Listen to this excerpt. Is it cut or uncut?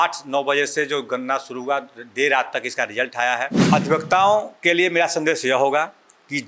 cut